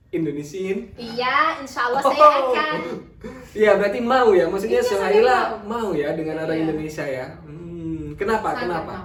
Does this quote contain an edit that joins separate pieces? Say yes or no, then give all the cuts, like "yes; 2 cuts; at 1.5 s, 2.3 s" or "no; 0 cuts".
no; 0 cuts